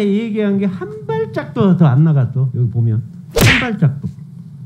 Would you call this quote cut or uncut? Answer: uncut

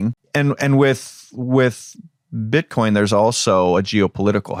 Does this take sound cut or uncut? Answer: uncut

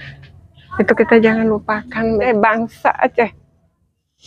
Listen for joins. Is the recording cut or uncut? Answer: cut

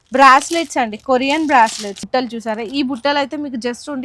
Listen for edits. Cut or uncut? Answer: cut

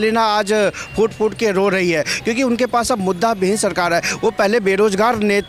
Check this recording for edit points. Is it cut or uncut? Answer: uncut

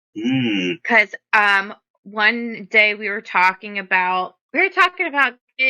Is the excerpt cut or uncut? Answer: cut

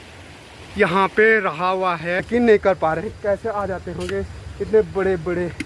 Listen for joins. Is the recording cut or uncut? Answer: cut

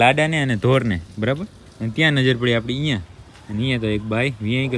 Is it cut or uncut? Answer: uncut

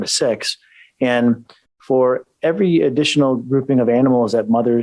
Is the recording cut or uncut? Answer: uncut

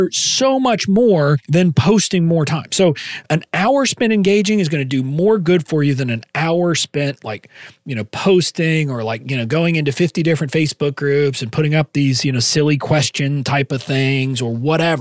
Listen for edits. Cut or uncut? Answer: cut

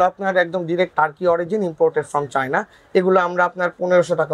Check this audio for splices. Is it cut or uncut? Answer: cut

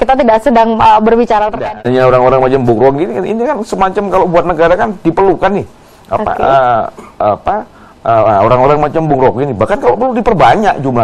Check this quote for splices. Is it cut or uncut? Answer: cut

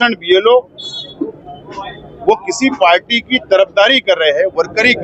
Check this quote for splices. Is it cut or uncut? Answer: uncut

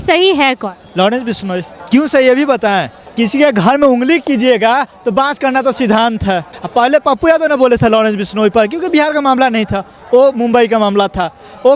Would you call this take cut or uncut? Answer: uncut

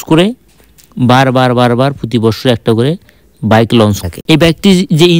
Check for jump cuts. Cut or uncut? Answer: cut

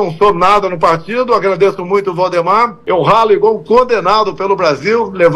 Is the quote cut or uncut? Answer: cut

